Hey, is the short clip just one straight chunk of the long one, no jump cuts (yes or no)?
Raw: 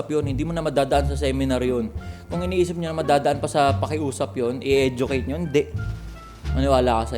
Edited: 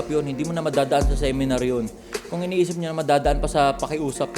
yes